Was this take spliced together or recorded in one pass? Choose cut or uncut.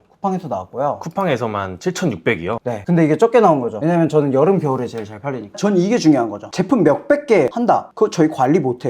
cut